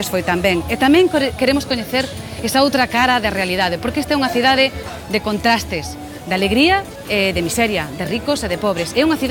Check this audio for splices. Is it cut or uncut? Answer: uncut